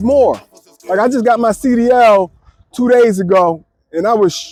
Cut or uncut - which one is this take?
uncut